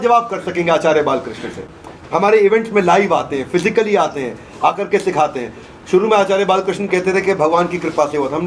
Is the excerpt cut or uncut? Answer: uncut